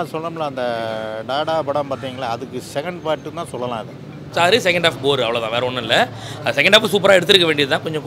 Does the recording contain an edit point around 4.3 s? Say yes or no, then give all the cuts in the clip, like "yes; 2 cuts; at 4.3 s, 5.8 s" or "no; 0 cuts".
yes; 1 cut; at 4.3 s